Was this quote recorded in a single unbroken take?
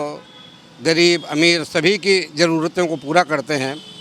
yes; 0 cuts

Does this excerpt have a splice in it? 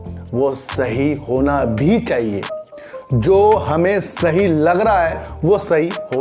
no; 0 cuts

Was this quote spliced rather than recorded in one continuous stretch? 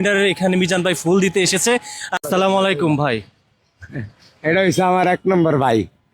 yes; 1 cut; at 2.2 s

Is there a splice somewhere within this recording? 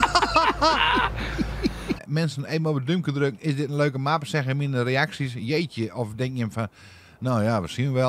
yes; 1 cut; at 2.0 s

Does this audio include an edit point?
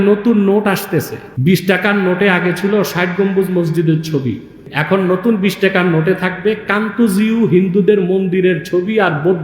yes; 2 cuts; at 1.2 s, 4.7 s

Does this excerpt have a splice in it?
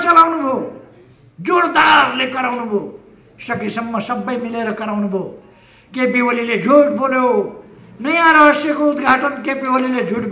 no; 0 cuts

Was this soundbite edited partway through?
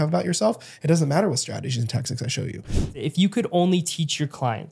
yes; 1 cut; at 2.9 s

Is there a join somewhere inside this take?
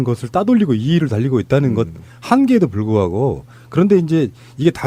no; 0 cuts

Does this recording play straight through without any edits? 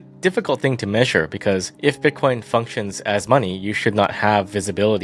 no; 1 cut; at 1.7 s

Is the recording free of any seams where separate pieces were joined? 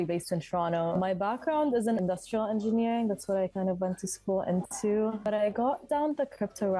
no; 3 cuts; at 1.0 s, 2.0 s, 5.2 s

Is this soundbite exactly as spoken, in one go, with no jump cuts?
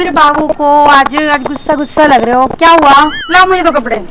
no; 1 cut; at 3.2 s

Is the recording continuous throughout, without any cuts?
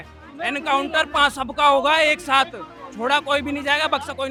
yes; 0 cuts

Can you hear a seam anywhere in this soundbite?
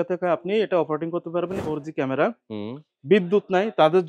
yes; 1 cut; at 1.6 s

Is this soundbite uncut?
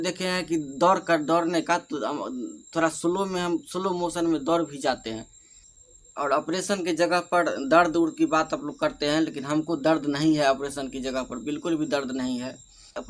yes; 0 cuts

